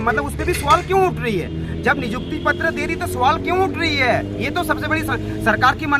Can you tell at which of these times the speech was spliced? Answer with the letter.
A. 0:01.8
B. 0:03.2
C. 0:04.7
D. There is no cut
D